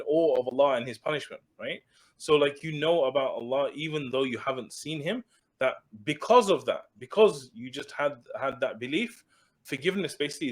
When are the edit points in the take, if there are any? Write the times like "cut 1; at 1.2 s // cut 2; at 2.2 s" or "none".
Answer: cut 1; at 9.6 s